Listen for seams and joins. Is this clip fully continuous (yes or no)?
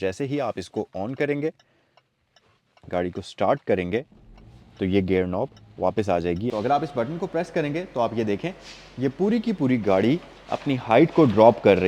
no